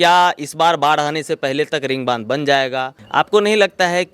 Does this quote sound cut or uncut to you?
cut